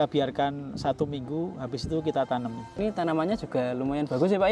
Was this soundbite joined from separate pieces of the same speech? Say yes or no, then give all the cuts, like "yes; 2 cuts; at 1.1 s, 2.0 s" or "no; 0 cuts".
yes; 1 cut; at 2.8 s